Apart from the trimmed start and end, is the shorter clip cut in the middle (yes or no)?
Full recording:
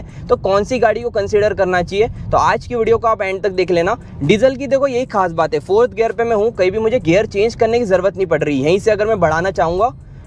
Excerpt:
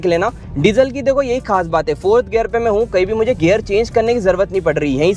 no